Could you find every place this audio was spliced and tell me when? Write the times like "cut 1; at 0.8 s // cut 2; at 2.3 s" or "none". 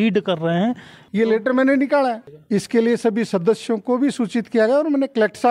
cut 1; at 1.0 s